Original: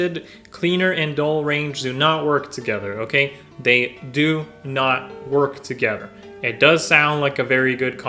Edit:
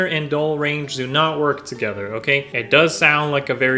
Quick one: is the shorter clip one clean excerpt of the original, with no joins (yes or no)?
no